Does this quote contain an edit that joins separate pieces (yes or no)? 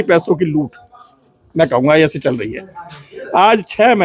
no